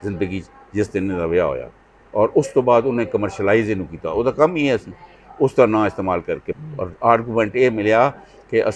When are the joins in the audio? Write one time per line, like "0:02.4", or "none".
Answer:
0:06.5